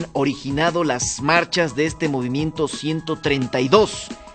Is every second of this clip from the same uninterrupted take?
yes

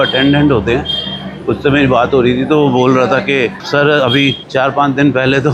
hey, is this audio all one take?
yes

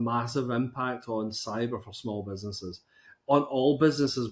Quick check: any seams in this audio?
no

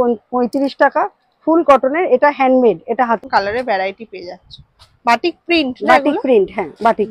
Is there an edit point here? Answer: yes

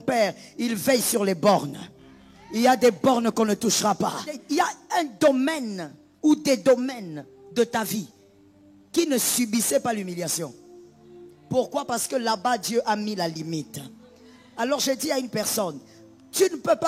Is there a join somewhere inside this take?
yes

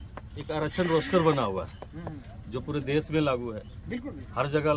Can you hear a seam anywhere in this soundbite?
no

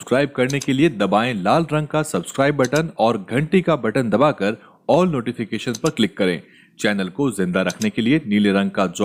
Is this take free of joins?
yes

